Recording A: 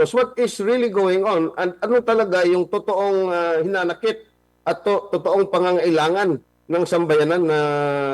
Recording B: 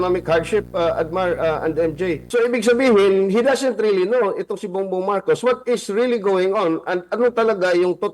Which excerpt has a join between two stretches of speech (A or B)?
B